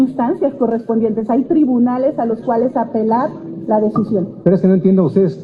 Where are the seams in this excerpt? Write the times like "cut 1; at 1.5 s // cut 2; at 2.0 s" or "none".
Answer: none